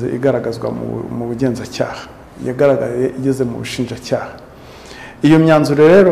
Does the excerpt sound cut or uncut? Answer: uncut